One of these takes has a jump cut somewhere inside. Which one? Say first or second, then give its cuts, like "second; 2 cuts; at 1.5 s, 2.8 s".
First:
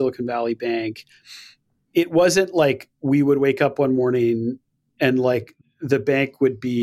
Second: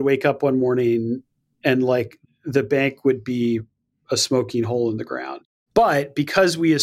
second; 1 cut; at 5.3 s